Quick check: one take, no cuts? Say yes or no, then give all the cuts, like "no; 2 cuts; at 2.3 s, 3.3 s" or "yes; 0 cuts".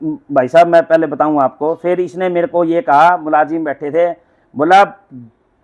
no; 1 cut; at 1.9 s